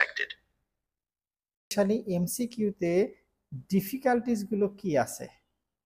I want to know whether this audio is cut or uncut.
cut